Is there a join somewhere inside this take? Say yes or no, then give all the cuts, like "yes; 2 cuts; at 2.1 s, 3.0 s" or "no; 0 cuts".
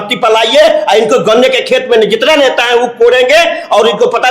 no; 0 cuts